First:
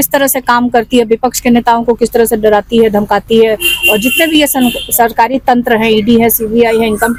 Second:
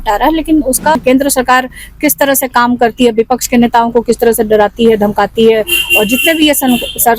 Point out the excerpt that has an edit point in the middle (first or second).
second